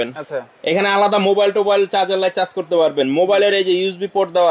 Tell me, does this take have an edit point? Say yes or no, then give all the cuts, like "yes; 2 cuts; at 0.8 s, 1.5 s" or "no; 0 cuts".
no; 0 cuts